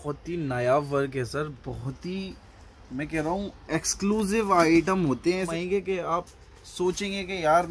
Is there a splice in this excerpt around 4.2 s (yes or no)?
no